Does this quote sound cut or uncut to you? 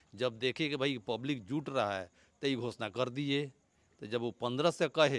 uncut